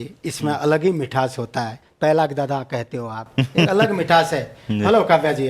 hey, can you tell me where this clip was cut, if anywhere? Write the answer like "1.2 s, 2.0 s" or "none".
1.8 s